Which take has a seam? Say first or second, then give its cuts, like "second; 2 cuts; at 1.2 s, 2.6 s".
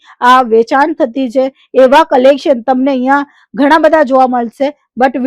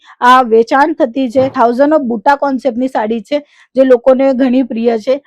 second; 1 cut; at 1.5 s